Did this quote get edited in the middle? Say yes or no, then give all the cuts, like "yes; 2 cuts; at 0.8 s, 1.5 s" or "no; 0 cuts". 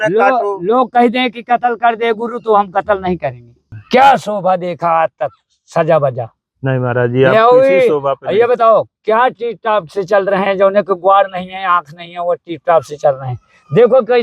yes; 1 cut; at 3.7 s